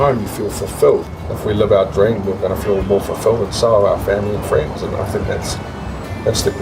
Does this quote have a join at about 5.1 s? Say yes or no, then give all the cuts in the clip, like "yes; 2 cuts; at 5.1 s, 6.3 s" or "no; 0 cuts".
no; 1 cut; at 1.1 s